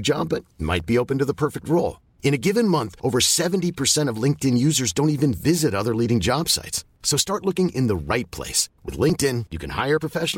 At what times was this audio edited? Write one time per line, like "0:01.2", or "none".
none